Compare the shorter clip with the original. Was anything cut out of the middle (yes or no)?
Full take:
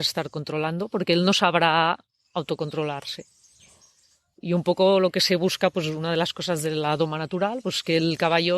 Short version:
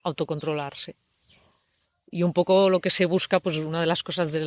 no